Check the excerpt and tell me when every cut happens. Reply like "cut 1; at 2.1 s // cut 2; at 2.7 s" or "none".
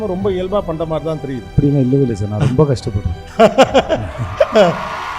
cut 1; at 1.5 s